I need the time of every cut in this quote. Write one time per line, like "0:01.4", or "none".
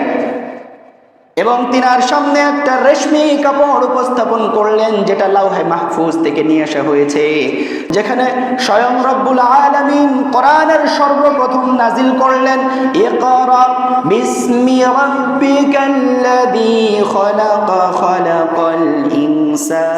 0:07.9